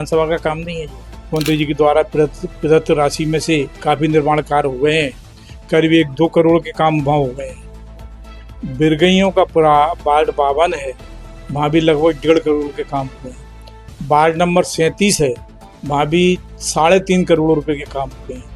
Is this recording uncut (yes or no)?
no